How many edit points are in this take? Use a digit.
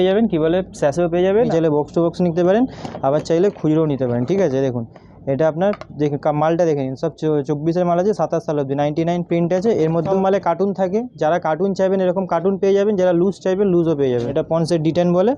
3